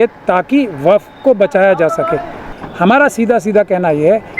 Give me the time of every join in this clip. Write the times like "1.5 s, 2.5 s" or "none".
2.6 s